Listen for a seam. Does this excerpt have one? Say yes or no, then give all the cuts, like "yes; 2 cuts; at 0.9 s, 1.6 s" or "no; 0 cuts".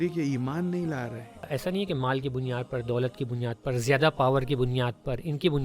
yes; 1 cut; at 1.5 s